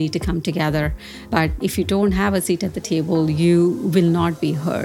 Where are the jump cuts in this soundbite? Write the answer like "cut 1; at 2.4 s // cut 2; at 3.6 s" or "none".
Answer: cut 1; at 1.6 s